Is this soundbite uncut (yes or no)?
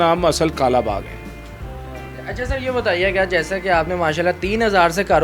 yes